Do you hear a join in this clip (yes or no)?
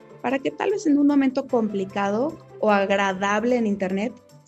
no